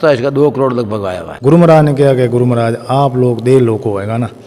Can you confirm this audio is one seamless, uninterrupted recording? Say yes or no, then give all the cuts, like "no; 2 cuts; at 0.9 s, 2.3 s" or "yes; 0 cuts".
no; 1 cut; at 1.2 s